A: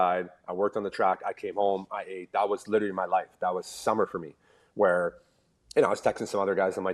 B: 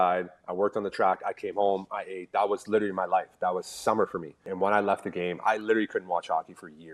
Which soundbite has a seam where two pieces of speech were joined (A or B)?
B